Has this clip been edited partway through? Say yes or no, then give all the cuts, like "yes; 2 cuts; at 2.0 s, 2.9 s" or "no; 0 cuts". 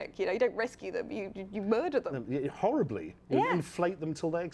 no; 0 cuts